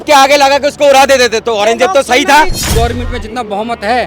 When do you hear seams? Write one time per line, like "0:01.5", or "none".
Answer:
0:02.6